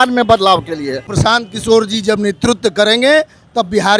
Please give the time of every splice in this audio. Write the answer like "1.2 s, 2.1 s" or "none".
1.1 s